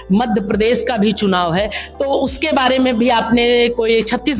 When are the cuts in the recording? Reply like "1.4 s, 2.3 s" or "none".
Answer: none